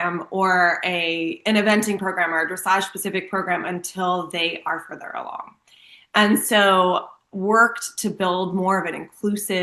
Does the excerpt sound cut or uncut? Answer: uncut